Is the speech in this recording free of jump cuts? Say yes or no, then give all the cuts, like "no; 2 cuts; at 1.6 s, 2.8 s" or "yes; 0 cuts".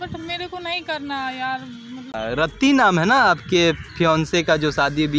no; 1 cut; at 2.1 s